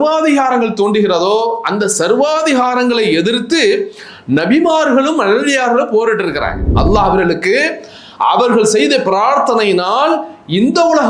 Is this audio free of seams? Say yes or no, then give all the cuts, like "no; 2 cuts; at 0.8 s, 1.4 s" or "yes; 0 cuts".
no; 1 cut; at 6.7 s